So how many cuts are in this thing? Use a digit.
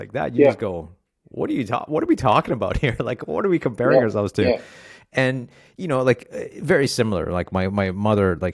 0